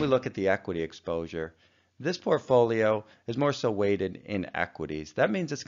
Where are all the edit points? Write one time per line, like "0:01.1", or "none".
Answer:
0:01.3